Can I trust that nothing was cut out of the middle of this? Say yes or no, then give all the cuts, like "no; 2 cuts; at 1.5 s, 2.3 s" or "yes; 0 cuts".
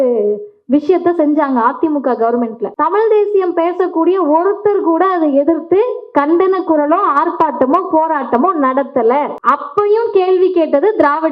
no; 2 cuts; at 2.6 s, 9.4 s